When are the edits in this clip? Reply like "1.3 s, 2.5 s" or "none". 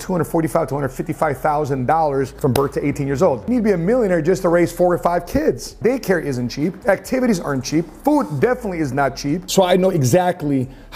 3.4 s, 5.7 s, 9.4 s